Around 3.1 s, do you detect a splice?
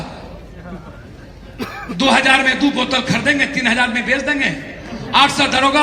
no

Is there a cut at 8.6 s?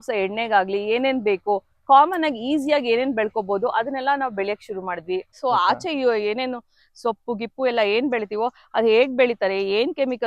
no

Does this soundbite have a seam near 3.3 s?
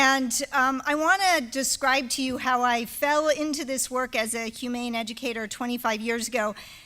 no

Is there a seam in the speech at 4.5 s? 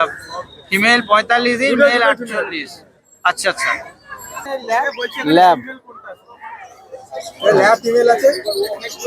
yes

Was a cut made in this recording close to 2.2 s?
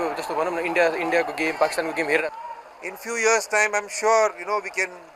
yes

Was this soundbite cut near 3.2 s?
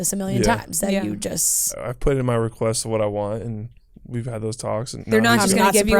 no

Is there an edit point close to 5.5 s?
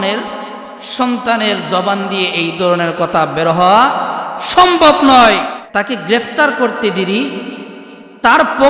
yes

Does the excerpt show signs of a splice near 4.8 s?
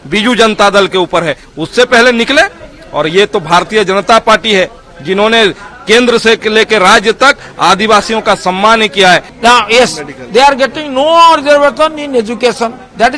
no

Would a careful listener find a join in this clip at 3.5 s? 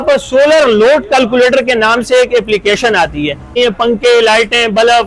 yes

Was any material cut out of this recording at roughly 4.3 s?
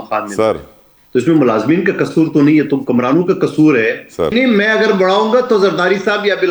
yes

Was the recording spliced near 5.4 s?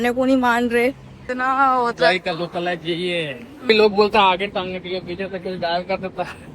no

